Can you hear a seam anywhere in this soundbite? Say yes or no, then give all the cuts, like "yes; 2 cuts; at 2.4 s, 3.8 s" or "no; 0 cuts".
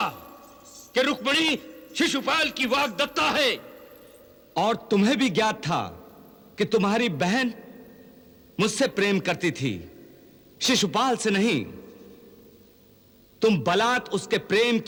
no; 0 cuts